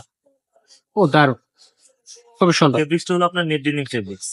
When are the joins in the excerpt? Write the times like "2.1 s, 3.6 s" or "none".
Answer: none